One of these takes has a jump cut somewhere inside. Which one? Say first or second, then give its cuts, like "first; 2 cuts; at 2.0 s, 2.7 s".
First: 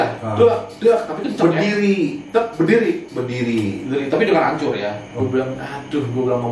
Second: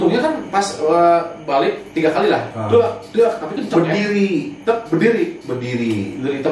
first; 1 cut; at 5.2 s